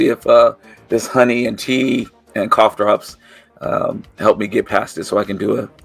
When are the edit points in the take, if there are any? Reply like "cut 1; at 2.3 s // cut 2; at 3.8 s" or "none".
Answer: none